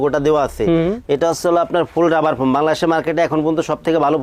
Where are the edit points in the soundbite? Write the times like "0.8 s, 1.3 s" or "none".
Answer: none